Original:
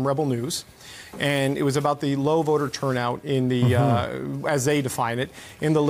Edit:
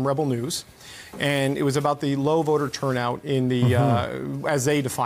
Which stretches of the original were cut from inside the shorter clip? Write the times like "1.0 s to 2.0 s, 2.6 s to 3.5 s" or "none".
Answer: none

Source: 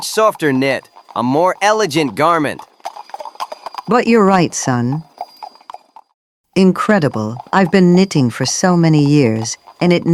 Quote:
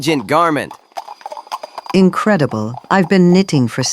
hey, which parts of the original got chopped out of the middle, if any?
3.6 s to 6.4 s

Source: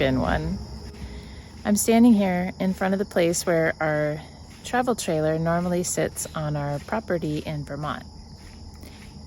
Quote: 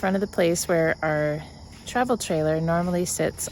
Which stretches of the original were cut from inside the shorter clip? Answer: none

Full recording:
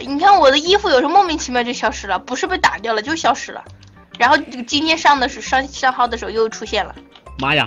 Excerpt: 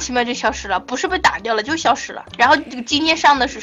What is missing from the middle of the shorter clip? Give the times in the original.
3.6 s to 4.0 s

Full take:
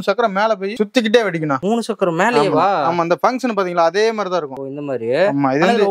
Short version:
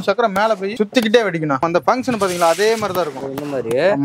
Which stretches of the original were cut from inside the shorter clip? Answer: 1.6 s to 3.0 s

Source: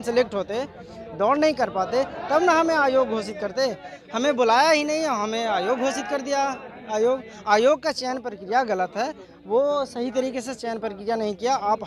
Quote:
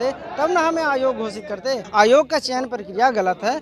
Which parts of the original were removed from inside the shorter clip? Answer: 3.8 s to 7.4 s

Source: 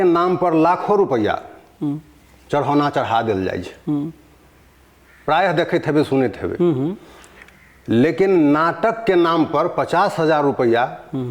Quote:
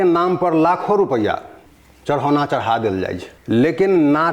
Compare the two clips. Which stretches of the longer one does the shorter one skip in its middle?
1.7 s to 2.1 s, 3.7 s to 7.7 s

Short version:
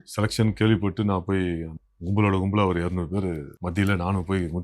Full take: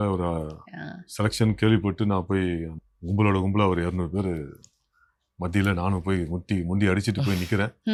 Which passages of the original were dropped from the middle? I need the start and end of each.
4.5 s to 5.3 s

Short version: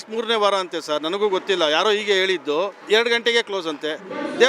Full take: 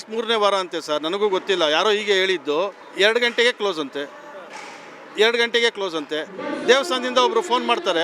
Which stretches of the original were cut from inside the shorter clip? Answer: 2.8 s to 5.1 s

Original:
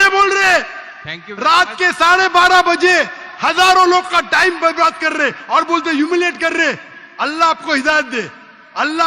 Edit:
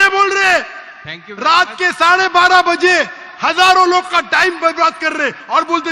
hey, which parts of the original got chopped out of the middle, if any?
none

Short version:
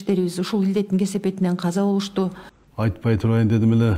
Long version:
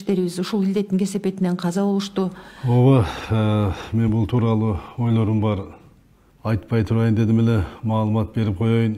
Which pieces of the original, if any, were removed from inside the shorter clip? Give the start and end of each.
2.5 s to 6.1 s

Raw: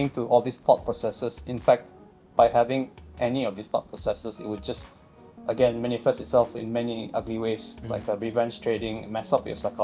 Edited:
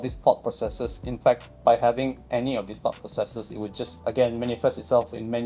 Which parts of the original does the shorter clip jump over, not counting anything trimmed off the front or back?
1.9 s to 2.2 s, 2.9 s to 3.1 s, 4.8 s to 5.4 s

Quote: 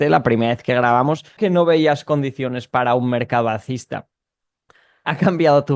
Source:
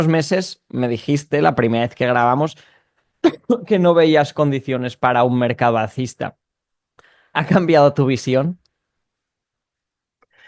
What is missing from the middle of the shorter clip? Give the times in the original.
2.7 s to 3.6 s

